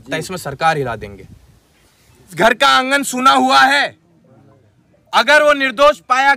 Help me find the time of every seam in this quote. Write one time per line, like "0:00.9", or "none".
0:02.3